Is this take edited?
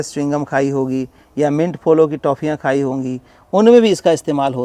no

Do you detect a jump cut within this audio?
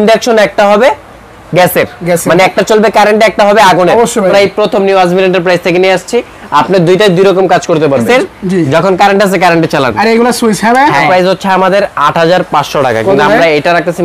yes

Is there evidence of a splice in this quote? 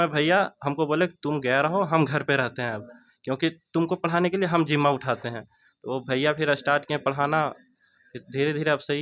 no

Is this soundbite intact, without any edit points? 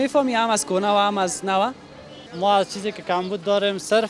no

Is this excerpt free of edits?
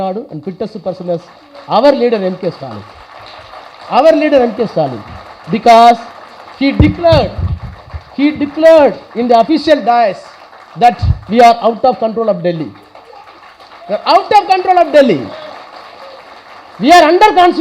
yes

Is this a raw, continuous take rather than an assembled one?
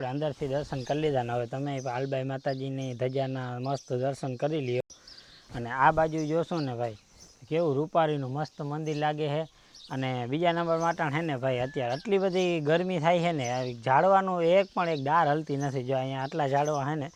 yes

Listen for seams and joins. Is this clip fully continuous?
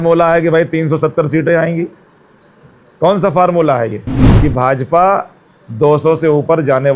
no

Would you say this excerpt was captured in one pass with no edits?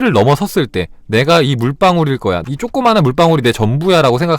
no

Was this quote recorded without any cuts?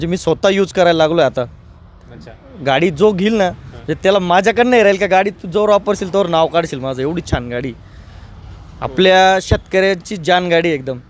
yes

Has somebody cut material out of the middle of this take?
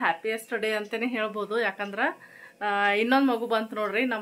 no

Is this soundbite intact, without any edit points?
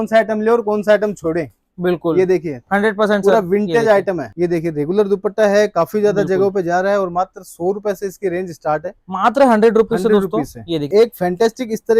no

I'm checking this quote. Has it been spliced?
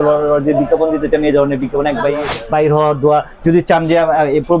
yes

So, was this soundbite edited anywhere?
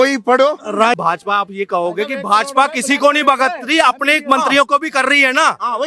yes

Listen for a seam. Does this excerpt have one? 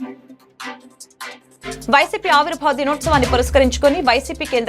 yes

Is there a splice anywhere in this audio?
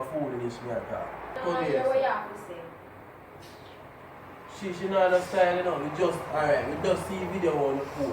yes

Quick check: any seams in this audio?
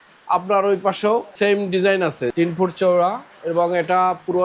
yes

